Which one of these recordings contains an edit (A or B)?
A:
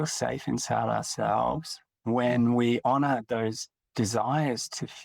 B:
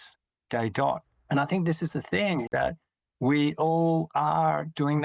B